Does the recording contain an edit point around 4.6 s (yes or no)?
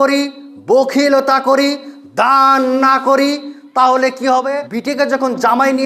yes